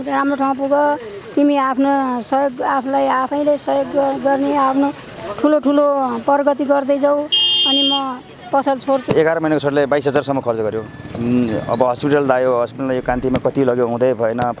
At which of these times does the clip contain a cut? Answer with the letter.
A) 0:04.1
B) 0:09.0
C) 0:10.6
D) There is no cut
B